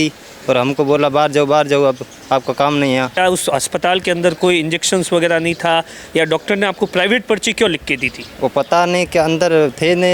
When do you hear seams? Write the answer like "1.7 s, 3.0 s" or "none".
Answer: 3.1 s